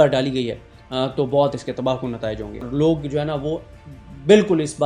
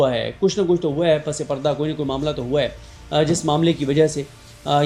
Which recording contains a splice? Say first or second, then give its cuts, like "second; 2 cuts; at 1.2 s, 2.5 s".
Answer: first; 1 cut; at 2.6 s